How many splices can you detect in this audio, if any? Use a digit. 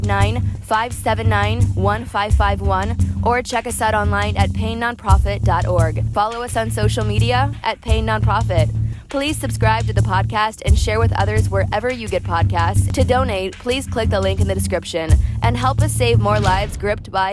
1